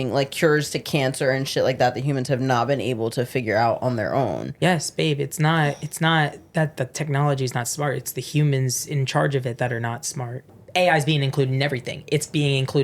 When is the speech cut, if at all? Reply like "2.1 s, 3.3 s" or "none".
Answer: 10.4 s